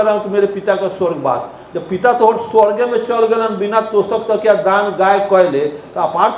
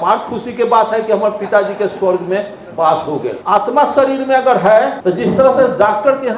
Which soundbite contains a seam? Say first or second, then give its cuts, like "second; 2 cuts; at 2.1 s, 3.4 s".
second; 2 cuts; at 3.4 s, 5.0 s